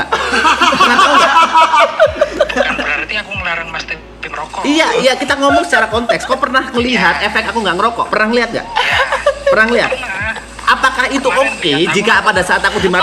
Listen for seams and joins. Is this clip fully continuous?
yes; 0 cuts

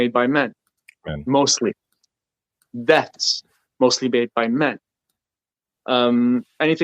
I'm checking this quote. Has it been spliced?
no; 0 cuts

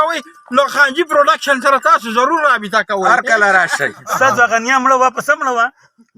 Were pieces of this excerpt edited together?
yes; 1 cut; at 4.0 s

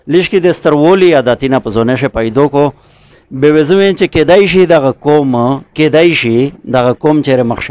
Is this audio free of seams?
yes; 0 cuts

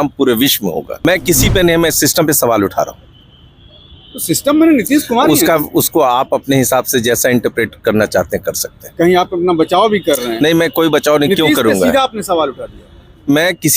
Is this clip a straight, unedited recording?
no; 1 cut; at 1.1 s

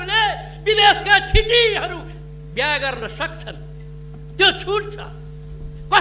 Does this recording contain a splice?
no; 0 cuts

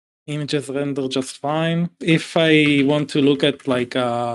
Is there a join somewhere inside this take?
yes; 1 cut; at 2.0 s

